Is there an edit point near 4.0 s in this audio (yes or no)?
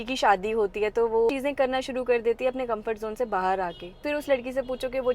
yes